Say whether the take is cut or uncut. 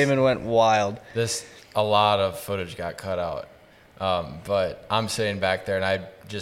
uncut